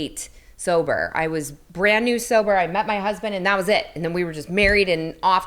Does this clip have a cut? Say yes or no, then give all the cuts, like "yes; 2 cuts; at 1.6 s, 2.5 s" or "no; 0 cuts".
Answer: yes; 1 cut; at 1.6 s